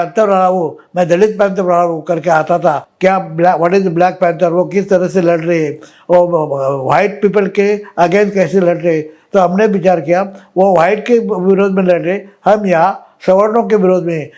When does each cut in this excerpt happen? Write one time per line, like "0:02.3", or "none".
0:02.9